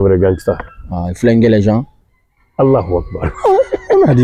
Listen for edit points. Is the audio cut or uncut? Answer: uncut